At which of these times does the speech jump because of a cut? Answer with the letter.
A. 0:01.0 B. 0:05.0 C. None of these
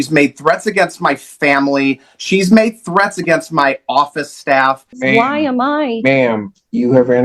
B